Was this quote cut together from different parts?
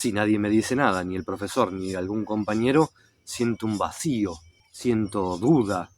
no; 0 cuts

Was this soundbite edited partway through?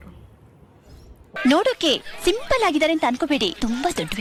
no; 0 cuts

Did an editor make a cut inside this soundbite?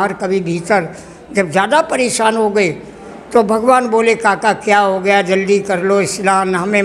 no; 0 cuts

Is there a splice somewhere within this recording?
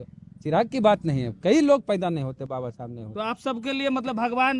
no; 0 cuts

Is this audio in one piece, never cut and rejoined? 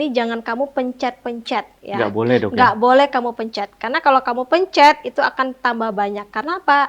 yes; 0 cuts

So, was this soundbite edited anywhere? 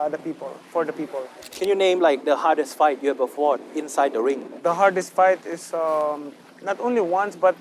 no; 0 cuts

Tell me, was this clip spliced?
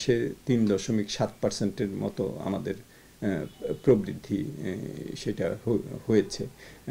no; 0 cuts

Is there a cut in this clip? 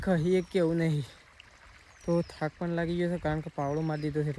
no; 0 cuts

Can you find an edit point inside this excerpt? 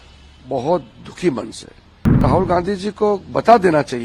yes; 1 cut; at 2.2 s

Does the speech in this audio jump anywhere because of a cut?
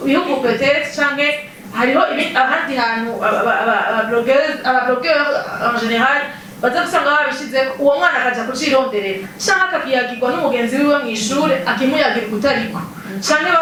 no; 0 cuts

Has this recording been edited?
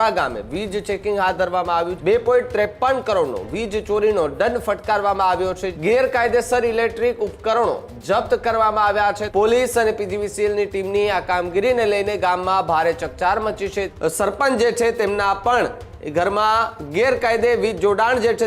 yes; 4 cuts; at 1.9 s, 5.7 s, 9.2 s, 13.9 s

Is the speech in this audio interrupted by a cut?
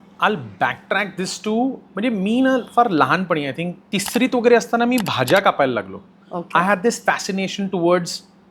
yes; 1 cut; at 3.7 s

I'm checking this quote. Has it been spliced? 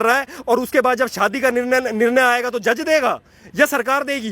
no; 0 cuts

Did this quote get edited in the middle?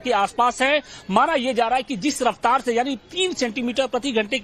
no; 0 cuts

